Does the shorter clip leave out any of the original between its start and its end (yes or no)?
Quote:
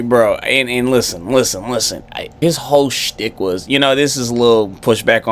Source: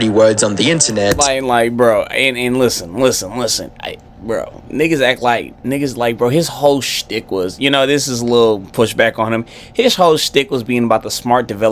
yes